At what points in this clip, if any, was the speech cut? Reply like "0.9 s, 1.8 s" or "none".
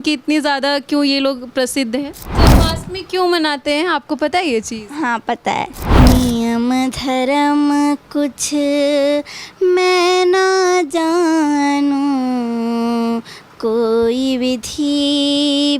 2.3 s, 5.8 s